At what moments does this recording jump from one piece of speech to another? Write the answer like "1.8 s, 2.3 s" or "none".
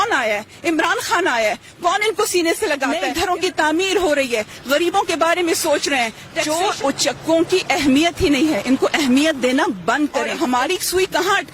3.1 s, 6.3 s, 10.3 s